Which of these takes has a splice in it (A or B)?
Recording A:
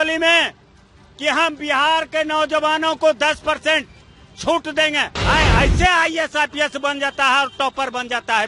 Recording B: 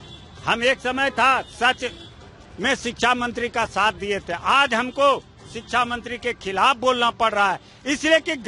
A